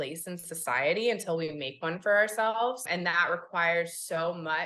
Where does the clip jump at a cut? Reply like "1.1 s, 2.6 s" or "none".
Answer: 2.8 s